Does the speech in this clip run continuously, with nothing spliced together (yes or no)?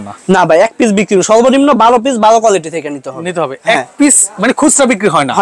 yes